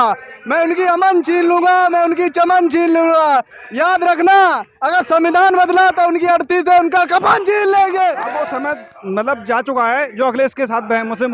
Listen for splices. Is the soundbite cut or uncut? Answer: cut